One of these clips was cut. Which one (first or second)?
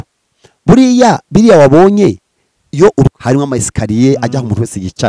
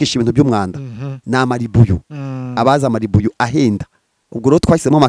first